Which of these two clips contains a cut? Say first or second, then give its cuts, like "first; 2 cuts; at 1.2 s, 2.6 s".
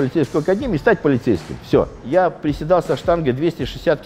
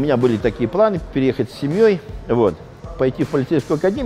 first; 1 cut; at 2.0 s